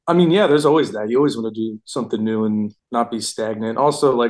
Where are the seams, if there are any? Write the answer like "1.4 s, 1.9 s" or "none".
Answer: 2.8 s